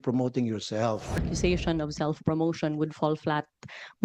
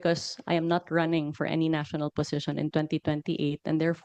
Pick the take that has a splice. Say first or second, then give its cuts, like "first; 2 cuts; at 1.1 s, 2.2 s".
first; 1 cut; at 1.2 s